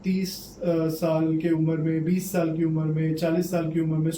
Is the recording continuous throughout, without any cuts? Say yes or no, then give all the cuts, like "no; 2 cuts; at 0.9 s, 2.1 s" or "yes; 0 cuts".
yes; 0 cuts